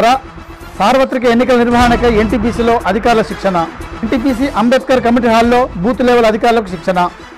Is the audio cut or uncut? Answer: uncut